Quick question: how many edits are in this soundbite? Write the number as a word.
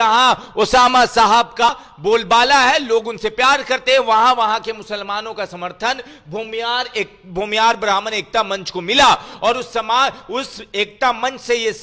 one